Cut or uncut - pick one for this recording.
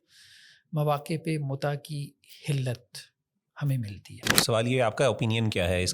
cut